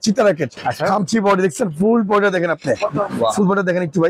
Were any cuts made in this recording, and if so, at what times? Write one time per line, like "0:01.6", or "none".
none